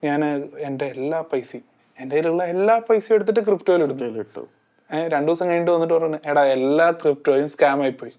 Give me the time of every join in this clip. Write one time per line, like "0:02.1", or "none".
none

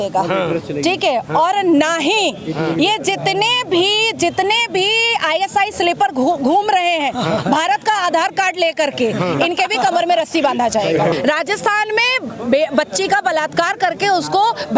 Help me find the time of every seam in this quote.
0:11.1

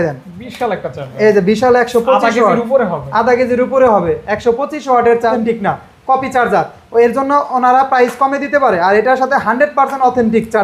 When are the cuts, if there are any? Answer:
0:05.3

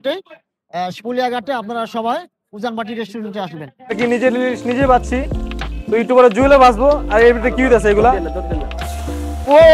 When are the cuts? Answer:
0:03.9

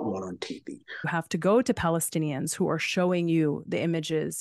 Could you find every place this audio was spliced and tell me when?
0:01.1

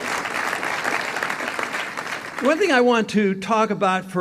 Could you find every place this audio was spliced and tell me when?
0:01.0

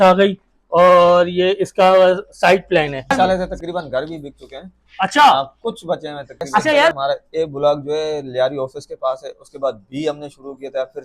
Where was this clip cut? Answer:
0:03.1
0:06.9

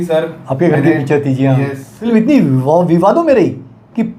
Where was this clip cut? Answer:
0:02.1

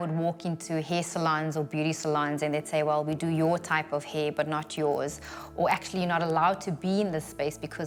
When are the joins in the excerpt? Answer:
none

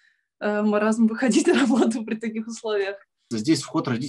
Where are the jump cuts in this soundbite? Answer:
0:03.1

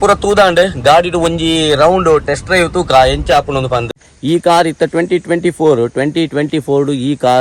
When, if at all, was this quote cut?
0:04.1

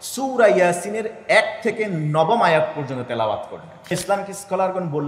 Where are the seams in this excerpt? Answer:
0:03.9

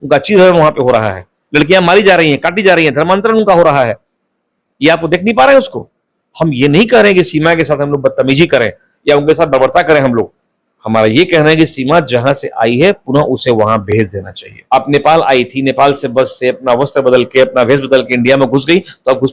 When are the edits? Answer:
none

